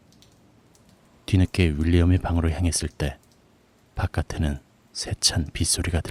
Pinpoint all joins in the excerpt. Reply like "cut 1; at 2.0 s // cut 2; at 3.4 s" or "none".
none